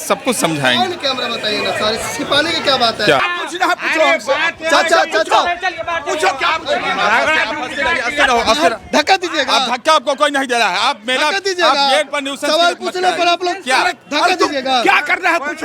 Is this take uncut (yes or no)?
no